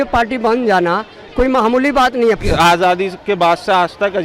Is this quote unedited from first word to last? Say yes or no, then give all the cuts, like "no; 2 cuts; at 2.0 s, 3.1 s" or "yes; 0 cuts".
no; 1 cut; at 2.4 s